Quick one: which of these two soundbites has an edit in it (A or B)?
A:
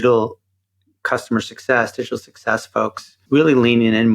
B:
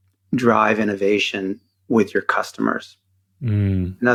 A